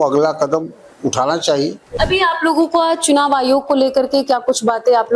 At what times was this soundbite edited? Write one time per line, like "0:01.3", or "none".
0:01.8